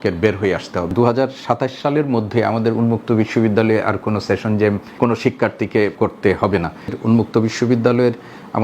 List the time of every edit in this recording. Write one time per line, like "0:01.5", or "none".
0:00.9
0:04.9
0:05.9
0:07.0

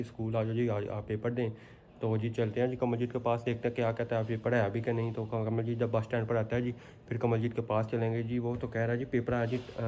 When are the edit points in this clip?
none

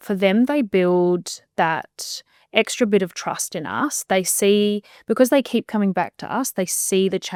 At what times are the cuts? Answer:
none

